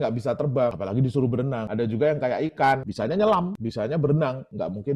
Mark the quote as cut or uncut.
cut